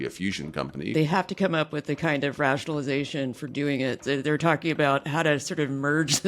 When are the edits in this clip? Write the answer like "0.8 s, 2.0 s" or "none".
0.9 s, 4.0 s